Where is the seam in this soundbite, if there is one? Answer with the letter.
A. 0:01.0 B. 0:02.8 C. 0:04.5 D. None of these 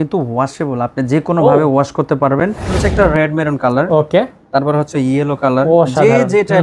B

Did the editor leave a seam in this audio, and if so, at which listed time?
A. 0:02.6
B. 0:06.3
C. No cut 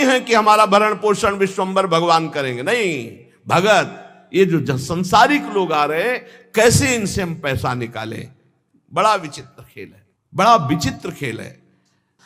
C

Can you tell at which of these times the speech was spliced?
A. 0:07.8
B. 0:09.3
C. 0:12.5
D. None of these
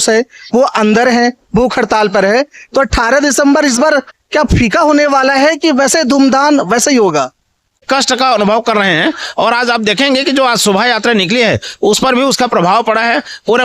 A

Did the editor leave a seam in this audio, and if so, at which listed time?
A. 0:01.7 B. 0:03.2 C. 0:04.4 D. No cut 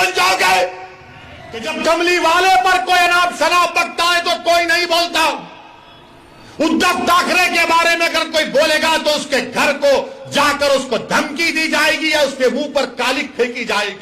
A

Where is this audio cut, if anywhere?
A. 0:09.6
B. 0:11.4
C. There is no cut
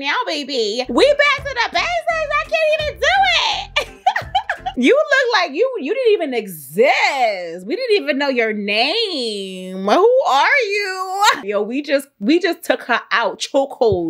B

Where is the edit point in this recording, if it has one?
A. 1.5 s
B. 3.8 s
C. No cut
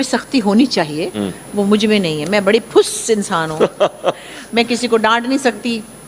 C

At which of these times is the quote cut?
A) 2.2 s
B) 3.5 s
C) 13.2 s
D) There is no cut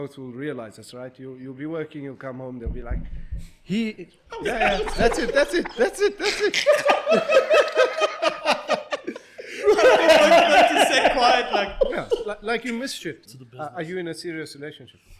C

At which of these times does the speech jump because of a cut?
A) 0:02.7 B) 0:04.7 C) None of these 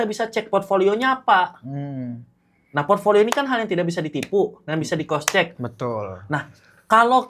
C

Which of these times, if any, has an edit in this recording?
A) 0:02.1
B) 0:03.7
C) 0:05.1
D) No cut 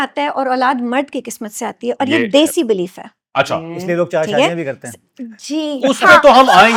D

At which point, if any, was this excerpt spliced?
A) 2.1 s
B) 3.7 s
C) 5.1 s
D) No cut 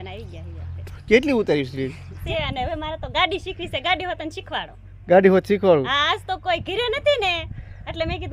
A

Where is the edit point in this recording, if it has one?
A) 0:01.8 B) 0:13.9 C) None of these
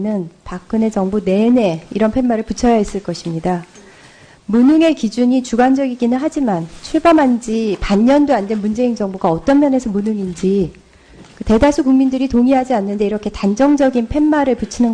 A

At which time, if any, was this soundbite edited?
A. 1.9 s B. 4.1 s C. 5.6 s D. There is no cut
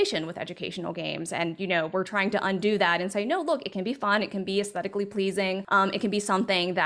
C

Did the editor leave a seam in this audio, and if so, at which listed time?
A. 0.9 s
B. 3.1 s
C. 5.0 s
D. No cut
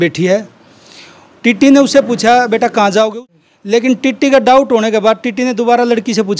B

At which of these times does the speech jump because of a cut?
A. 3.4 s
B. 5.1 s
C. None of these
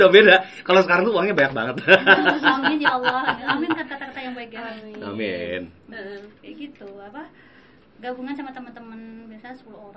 C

